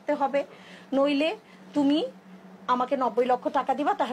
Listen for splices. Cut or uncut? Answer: uncut